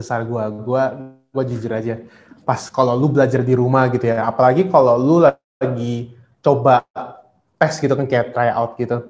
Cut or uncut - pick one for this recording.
uncut